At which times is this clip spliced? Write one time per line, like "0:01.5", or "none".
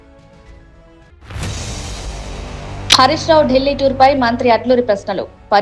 none